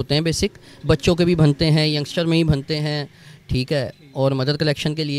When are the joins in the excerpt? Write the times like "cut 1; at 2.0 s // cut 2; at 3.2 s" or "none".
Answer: none